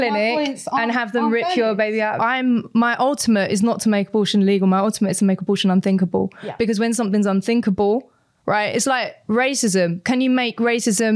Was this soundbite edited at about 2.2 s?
yes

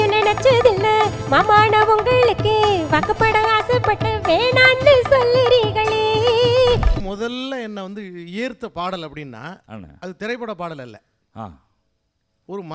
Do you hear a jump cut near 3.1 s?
no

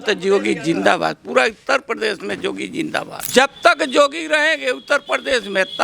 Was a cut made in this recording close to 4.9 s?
no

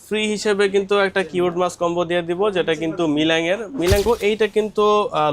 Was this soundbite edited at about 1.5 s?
no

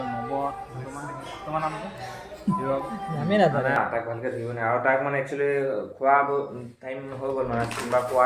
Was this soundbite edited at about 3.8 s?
yes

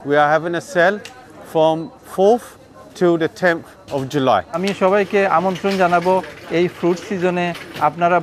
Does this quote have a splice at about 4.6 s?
yes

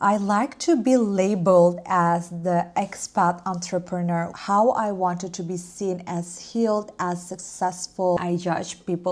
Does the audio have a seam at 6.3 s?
no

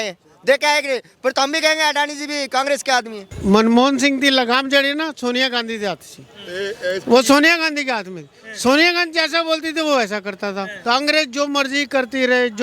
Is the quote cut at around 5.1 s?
no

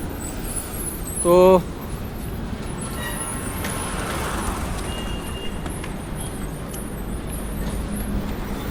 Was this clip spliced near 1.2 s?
no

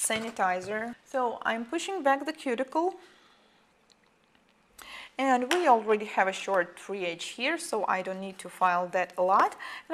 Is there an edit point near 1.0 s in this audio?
no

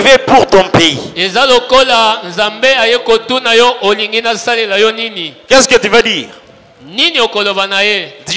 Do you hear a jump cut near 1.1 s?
no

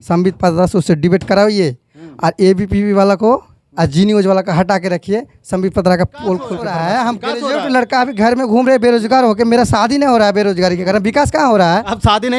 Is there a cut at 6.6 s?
yes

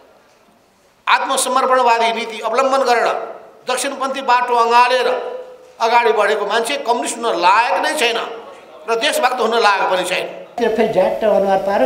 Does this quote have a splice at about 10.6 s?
yes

